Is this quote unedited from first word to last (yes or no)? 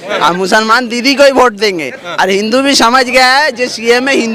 yes